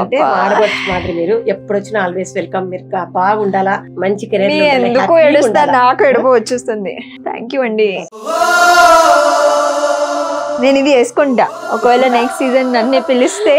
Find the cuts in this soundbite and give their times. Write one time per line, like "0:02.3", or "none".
none